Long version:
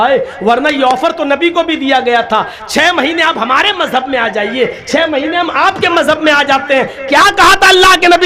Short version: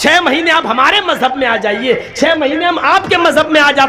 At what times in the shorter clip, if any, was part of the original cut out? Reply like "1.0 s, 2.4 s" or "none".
none